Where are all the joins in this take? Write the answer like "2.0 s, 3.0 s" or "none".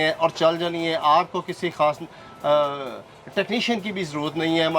none